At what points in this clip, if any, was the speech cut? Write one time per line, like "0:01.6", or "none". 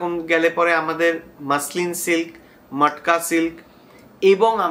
none

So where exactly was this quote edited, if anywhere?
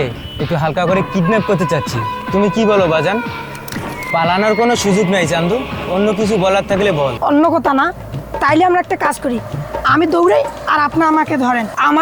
none

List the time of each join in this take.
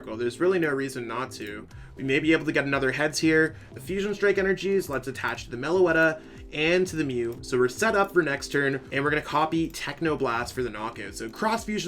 0:03.6
0:08.9

